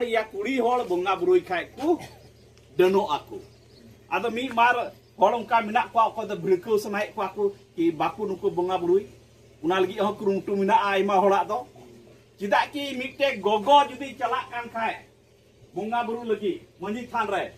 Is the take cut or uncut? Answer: uncut